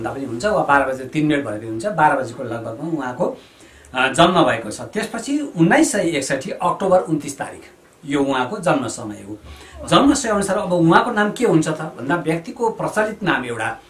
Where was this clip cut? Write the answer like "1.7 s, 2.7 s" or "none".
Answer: none